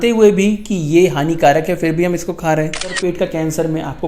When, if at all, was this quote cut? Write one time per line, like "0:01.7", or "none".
0:03.0

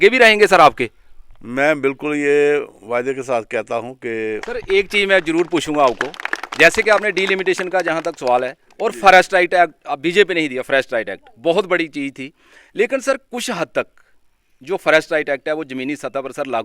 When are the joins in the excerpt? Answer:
0:04.4

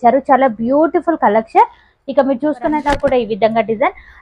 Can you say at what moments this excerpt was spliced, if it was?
0:02.8

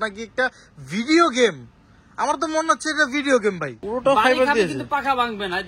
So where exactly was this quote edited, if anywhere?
0:03.7

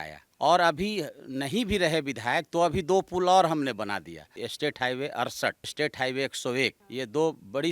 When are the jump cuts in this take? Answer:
0:04.3
0:05.7
0:06.8

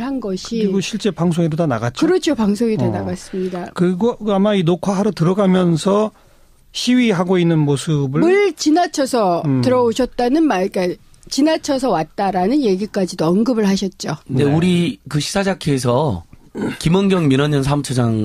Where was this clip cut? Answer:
0:06.8

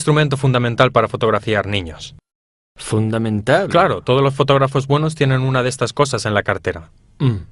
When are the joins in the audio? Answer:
0:01.0

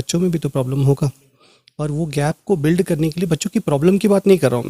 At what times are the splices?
none

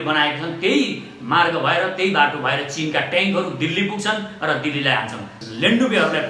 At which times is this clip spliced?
0:05.3

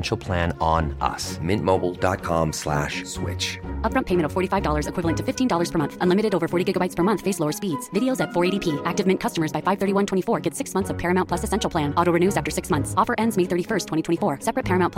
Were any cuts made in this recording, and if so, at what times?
none

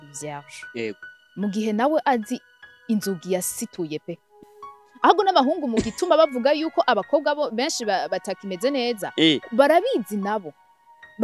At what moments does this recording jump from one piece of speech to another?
0:04.4

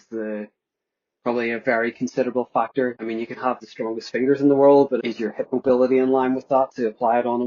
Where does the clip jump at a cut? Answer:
0:03.0
0:05.0

